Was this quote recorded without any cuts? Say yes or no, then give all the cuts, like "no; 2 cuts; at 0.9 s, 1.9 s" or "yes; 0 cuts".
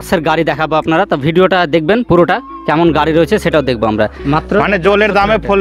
no; 1 cut; at 4.2 s